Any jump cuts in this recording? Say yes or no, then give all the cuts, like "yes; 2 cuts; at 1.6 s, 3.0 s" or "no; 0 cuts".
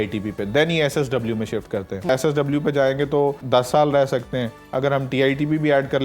yes; 2 cuts; at 2.1 s, 3.4 s